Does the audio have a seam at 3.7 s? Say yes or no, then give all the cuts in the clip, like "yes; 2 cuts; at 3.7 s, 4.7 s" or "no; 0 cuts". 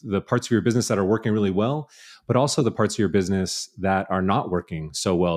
no; 0 cuts